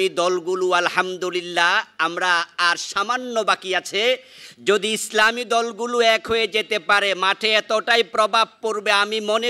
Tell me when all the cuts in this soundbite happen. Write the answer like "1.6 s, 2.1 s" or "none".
none